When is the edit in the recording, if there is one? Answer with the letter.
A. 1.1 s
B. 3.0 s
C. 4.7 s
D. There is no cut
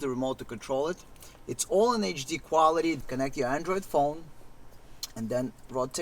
B